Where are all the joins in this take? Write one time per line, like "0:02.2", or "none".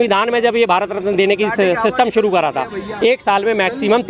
none